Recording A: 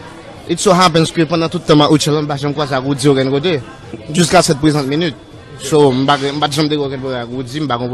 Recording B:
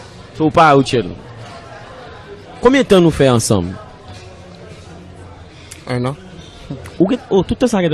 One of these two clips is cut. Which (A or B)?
B